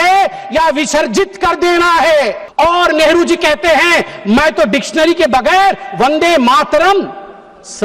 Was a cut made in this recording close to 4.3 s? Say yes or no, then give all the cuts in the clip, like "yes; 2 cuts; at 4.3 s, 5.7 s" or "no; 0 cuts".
no; 1 cut; at 2.4 s